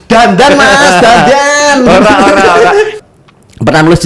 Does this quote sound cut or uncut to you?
cut